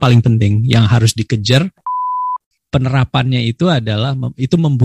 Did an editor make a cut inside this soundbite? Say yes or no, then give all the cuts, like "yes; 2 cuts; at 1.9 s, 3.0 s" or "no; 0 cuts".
yes; 1 cut; at 2.1 s